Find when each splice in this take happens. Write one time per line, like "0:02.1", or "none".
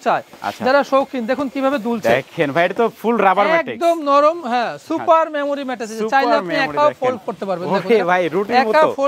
none